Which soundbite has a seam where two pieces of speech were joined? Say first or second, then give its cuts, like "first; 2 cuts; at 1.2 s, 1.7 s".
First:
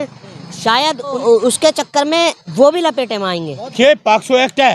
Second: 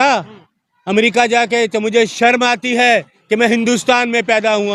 first; 2 cuts; at 1.2 s, 3.7 s